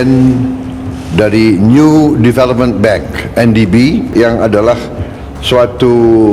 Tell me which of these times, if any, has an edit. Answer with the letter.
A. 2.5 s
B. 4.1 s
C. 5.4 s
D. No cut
B